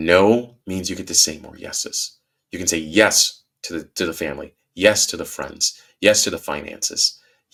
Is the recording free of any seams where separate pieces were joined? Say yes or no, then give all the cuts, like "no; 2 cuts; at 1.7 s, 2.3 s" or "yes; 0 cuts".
yes; 0 cuts